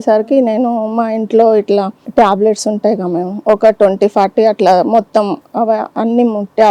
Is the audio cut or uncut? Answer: cut